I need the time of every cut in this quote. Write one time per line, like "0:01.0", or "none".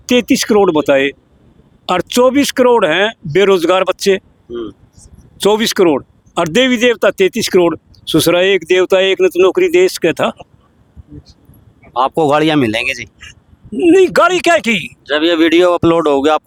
none